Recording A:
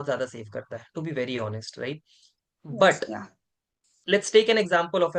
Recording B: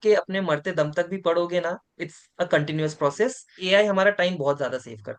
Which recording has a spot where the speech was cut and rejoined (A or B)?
B